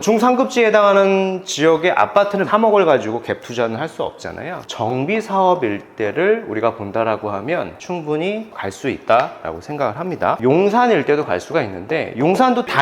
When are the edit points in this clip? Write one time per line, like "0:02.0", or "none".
0:02.5
0:04.6
0:07.8
0:10.4